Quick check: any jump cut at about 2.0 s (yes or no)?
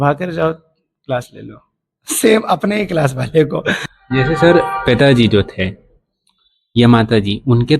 no